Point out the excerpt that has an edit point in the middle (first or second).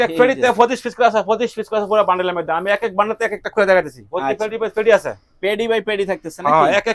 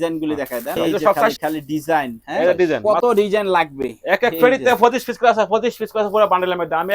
second